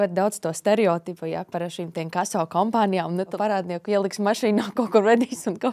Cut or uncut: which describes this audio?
cut